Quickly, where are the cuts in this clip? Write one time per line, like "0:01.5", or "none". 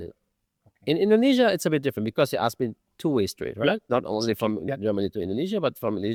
none